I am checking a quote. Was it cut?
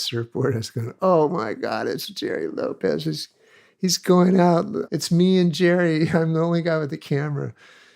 yes; 1 cut; at 4.8 s

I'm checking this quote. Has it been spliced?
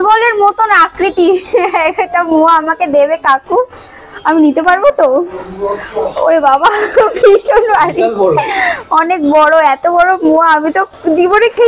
no; 0 cuts

